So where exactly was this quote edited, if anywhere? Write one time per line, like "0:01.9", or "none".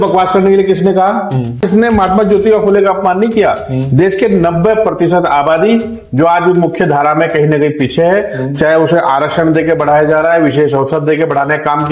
0:01.7